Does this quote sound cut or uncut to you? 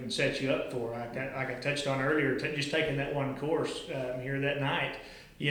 uncut